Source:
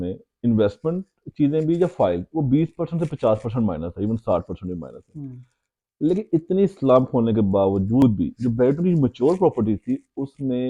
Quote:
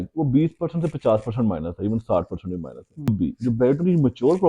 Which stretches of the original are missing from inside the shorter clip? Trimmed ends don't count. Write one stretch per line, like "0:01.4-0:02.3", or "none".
0:05.3-0:08.1